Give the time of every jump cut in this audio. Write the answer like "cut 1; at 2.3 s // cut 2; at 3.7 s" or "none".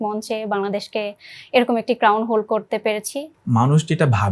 cut 1; at 3.3 s